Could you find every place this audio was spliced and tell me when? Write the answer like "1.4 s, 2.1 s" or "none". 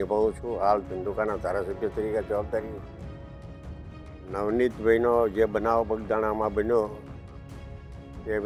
none